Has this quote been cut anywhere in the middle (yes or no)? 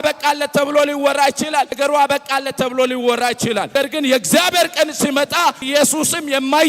yes